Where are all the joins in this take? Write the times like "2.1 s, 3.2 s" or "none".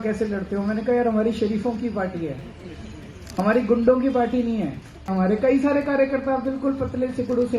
5.1 s